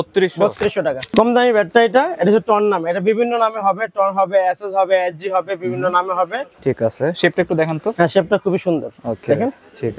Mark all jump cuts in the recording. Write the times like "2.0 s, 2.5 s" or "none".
1.1 s, 6.5 s